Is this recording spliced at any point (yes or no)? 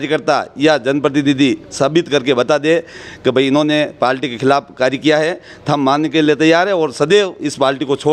no